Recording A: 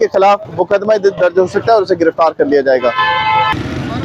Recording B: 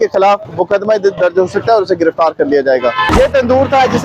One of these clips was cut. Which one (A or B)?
B